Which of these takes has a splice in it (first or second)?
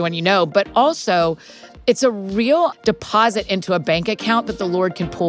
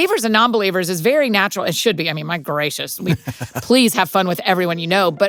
first